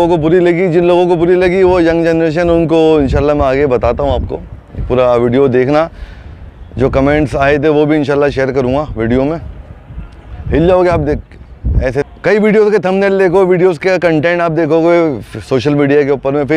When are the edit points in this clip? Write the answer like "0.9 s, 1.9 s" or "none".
12.0 s